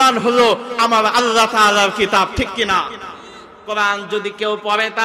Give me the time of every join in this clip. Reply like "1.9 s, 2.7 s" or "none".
3.5 s